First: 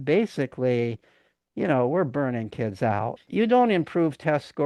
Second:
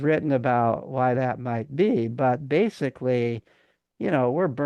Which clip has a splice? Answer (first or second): first